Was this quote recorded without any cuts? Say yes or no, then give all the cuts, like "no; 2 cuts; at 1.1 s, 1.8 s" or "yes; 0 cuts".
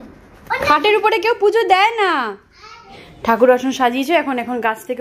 yes; 0 cuts